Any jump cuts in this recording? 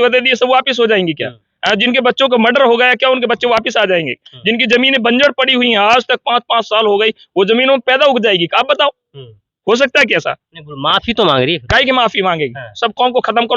no; 0 cuts

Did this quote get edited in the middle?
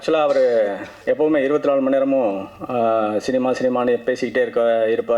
no; 0 cuts

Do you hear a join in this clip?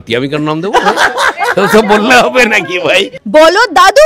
yes; 1 cut; at 3.2 s

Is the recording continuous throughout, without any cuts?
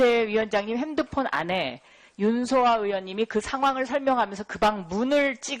yes; 0 cuts

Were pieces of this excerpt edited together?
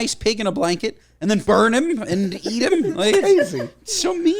yes; 1 cut; at 1.4 s

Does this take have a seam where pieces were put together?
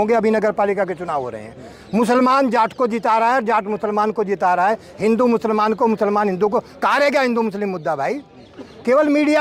no; 0 cuts

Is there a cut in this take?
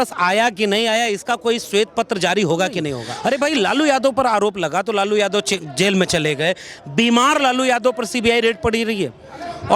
yes; 1 cut; at 3.0 s

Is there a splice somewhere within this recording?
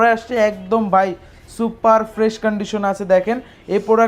no; 0 cuts

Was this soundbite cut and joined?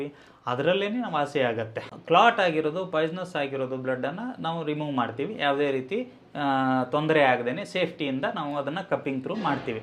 yes; 1 cut; at 1.8 s

